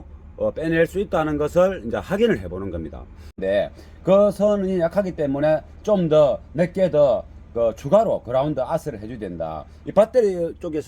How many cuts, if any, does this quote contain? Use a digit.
1